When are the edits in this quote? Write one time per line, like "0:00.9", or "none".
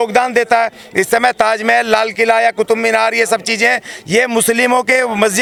none

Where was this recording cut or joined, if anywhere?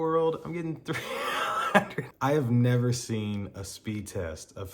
0:02.1

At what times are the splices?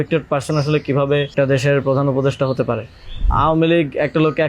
0:01.3
0:03.3

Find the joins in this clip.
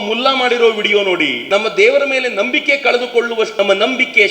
0:01.3
0:03.5

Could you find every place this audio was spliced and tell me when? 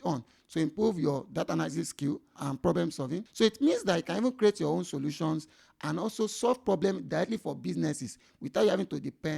0:02.3
0:03.3

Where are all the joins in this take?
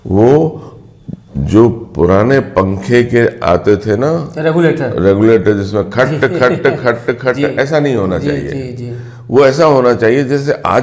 none

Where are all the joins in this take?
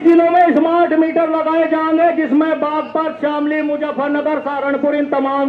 none

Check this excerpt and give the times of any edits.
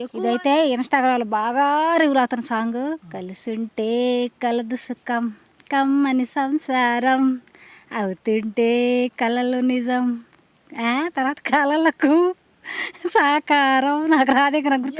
none

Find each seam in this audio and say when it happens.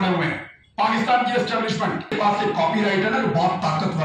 0:02.1

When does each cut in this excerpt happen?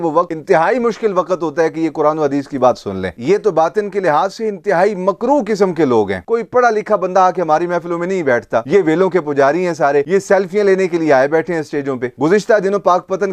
0:06.2
0:08.6
0:12.2

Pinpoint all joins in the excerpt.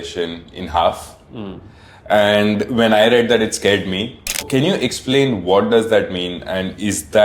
0:04.4

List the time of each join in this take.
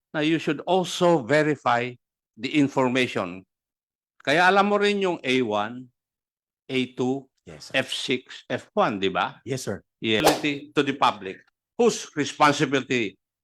0:10.2

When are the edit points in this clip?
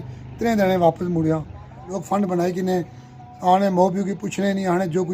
0:01.9

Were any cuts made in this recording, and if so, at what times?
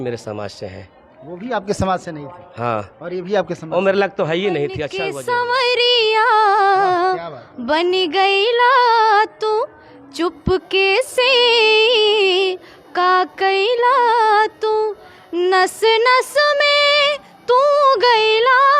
0:04.9

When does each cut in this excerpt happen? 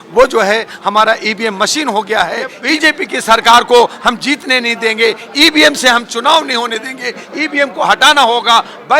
0:02.6

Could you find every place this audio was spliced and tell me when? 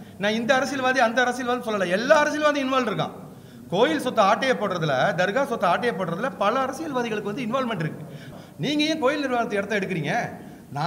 0:08.3

